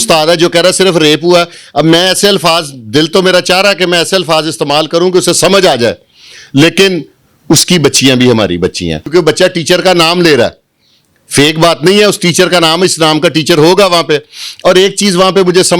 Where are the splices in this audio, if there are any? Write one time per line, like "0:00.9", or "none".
0:08.9